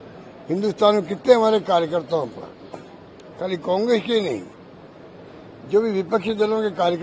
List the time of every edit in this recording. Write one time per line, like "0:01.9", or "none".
none